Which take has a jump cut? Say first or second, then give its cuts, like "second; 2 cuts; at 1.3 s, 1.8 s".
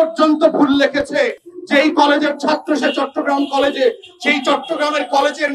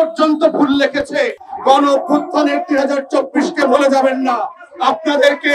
second; 1 cut; at 1.5 s